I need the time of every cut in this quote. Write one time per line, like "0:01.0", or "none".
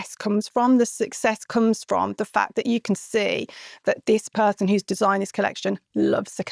none